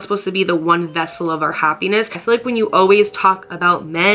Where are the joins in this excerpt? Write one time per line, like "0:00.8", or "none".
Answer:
0:02.2